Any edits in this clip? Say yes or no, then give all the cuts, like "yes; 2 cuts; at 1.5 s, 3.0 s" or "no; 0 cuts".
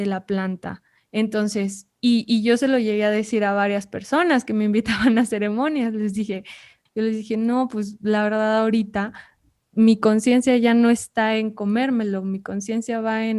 yes; 1 cut; at 6.8 s